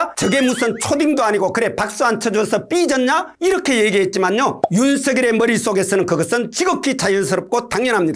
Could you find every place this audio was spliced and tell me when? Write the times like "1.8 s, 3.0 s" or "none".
none